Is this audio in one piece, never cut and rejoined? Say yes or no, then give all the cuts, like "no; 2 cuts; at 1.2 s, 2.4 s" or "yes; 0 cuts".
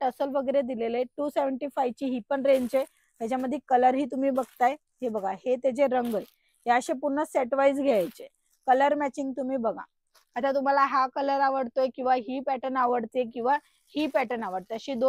yes; 0 cuts